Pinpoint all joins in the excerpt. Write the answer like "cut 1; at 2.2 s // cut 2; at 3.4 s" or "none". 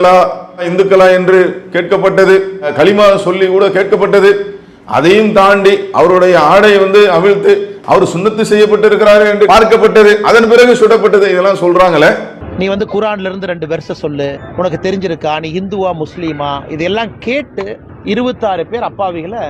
none